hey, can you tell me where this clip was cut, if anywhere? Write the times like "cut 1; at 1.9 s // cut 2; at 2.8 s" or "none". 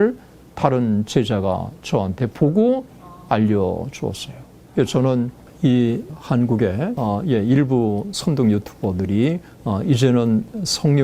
cut 1; at 5.4 s // cut 2; at 6.1 s // cut 3; at 7.0 s // cut 4; at 9.5 s